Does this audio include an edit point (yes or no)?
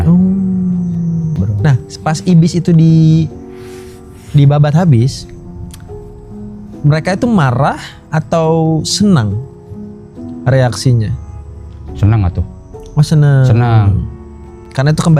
yes